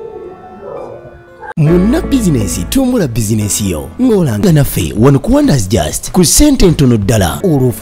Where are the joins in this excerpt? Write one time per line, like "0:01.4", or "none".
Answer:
0:01.4